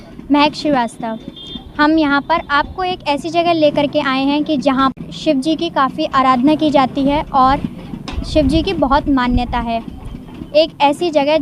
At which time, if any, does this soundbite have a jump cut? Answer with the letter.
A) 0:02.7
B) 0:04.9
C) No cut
B